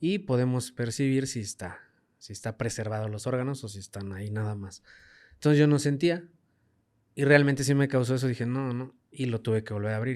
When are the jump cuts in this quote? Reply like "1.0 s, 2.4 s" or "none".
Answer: none